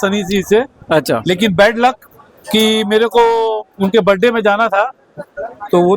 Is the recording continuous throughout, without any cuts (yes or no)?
yes